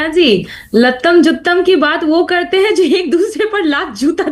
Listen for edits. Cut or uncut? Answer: uncut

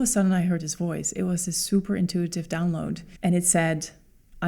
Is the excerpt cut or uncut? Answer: cut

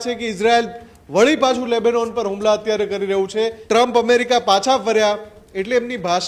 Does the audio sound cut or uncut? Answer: cut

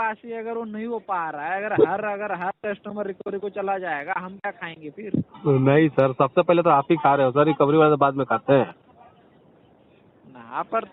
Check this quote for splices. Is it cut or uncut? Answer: uncut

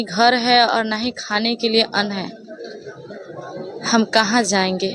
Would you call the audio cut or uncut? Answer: uncut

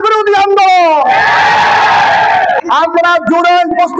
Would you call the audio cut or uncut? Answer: uncut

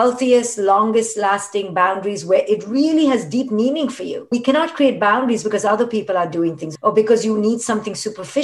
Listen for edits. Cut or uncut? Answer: cut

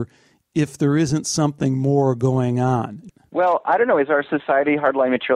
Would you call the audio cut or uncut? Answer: cut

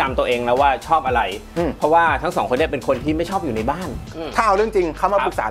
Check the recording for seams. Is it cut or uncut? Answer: uncut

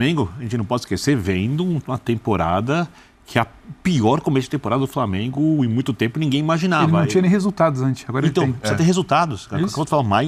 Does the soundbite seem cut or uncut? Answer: uncut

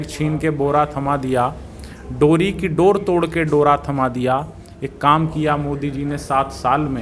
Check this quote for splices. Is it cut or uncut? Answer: uncut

